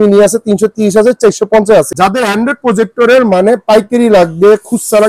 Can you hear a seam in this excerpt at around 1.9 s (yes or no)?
yes